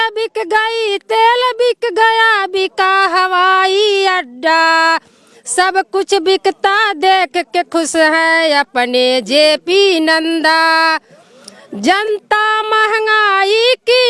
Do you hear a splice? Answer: no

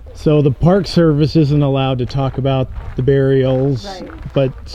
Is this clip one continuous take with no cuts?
yes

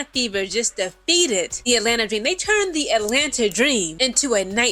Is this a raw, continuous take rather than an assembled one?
no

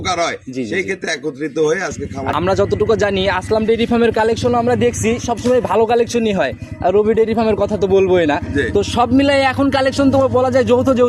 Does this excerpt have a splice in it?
yes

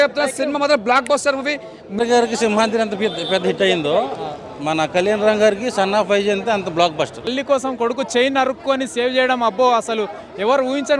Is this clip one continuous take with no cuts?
no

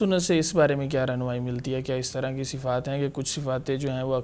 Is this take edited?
no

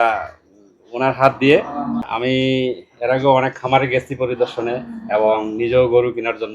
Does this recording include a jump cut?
yes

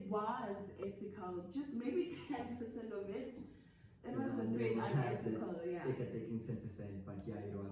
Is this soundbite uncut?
yes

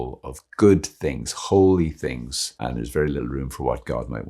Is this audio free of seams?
no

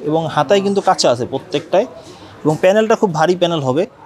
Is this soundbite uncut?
yes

